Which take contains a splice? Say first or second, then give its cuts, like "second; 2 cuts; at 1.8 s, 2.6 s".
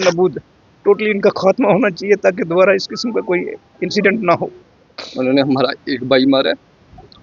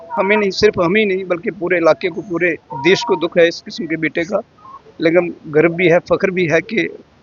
first; 1 cut; at 5.0 s